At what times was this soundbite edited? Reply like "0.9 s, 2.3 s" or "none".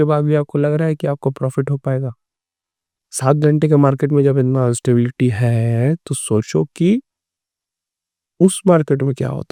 none

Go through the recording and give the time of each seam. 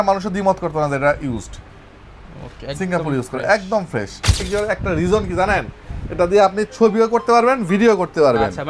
4.3 s

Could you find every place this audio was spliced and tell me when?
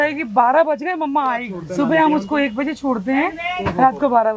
1.6 s

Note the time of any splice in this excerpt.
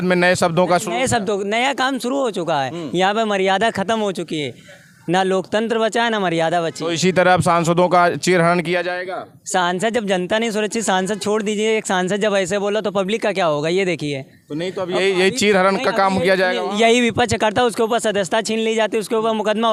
none

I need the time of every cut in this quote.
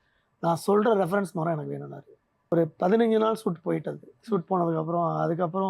2.5 s

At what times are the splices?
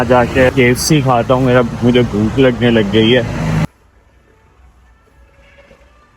3.6 s

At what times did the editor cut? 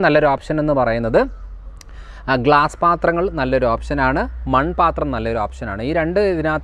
none

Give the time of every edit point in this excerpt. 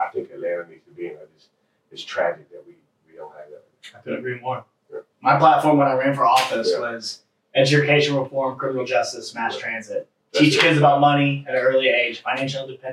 none

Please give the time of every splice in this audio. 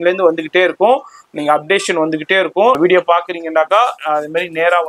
2.8 s

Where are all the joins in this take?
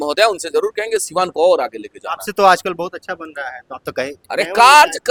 none

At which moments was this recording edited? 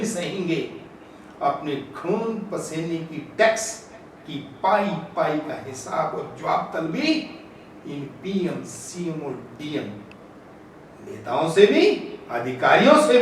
none

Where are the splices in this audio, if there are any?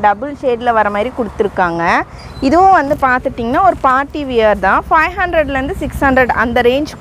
none

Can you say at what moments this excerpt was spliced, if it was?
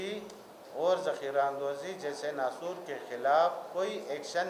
none

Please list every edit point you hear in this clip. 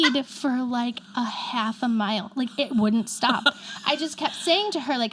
none

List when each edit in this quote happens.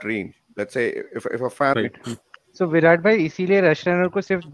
1.7 s

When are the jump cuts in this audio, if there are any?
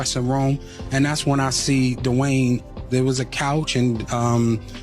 2.7 s

